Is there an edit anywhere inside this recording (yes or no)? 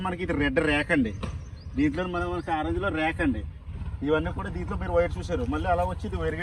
no